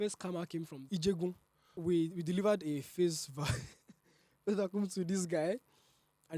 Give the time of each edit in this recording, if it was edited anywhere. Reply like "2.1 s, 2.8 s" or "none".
0.8 s, 1.8 s